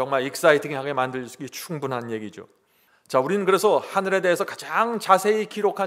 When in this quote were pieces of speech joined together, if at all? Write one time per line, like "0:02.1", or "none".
none